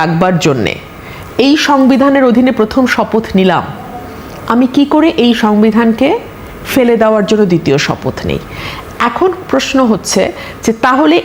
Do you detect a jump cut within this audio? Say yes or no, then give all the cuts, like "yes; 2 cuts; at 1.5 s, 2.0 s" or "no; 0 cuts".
no; 0 cuts